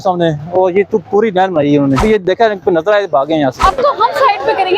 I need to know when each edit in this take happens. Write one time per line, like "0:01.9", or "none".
0:02.0
0:03.6